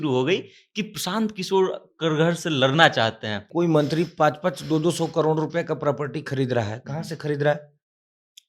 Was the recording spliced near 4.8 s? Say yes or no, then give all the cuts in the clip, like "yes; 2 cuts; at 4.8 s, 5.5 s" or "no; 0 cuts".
no; 1 cut; at 3.5 s